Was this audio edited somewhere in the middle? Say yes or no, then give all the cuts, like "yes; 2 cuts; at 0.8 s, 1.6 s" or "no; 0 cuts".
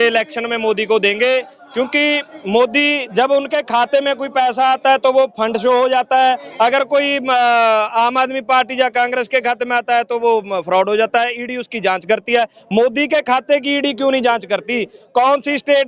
no; 0 cuts